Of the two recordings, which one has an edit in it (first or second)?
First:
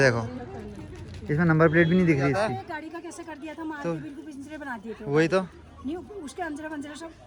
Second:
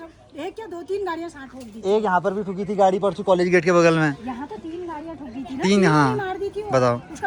first